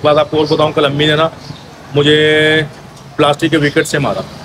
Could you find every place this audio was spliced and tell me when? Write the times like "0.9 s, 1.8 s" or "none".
none